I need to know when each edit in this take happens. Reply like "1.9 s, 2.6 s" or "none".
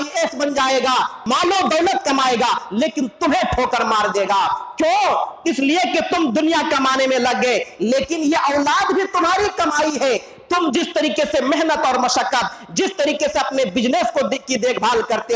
1.2 s